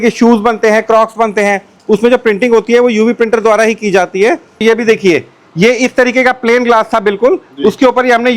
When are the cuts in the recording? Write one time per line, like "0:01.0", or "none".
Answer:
0:04.6